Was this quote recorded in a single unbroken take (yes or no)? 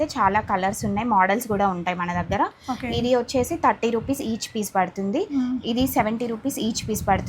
yes